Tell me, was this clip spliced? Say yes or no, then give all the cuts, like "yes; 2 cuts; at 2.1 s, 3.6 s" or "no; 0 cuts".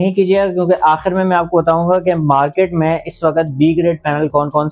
no; 0 cuts